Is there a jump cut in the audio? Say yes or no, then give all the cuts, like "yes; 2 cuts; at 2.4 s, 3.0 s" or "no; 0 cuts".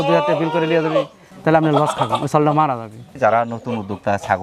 yes; 2 cuts; at 1.2 s, 3.1 s